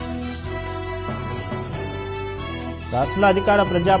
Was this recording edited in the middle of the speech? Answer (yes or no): no